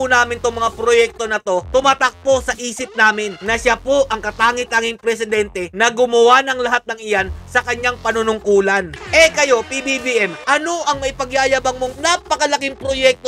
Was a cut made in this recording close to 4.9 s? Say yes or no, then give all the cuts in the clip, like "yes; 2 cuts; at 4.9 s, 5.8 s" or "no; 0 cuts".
no; 2 cuts; at 9.0 s, 12.0 s